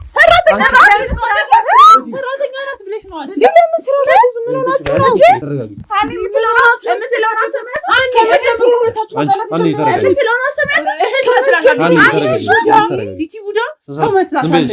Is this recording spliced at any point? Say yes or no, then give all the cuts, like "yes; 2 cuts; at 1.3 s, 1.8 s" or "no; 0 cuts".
no; 0 cuts